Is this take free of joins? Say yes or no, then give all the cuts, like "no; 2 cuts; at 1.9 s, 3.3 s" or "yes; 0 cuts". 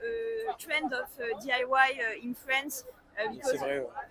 yes; 0 cuts